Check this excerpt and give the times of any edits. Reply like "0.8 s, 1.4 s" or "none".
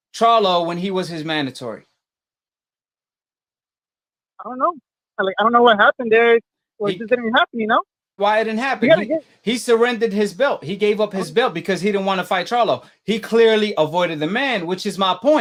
none